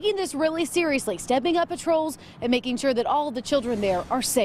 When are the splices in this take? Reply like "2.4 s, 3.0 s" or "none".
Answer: 3.5 s